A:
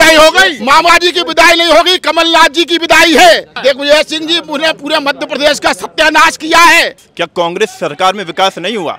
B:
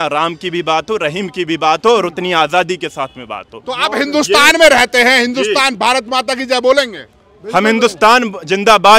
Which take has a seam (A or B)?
A